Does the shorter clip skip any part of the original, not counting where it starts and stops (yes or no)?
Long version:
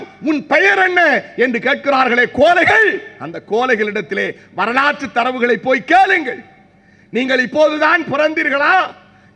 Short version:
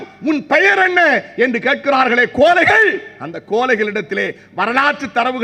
no